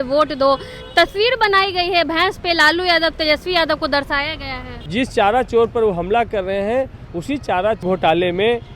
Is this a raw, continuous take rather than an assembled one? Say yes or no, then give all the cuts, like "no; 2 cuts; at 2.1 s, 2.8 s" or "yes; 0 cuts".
no; 2 cuts; at 4.8 s, 7.8 s